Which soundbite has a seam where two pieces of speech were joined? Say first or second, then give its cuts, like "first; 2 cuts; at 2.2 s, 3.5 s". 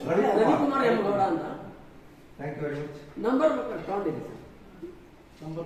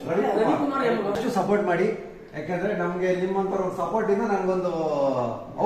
second; 1 cut; at 1.3 s